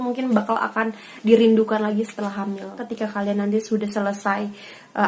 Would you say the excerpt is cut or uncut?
cut